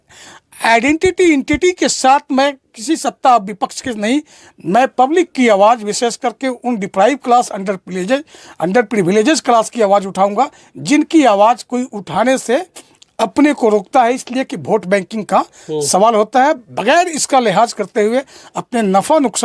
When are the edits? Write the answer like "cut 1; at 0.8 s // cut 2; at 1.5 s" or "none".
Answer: none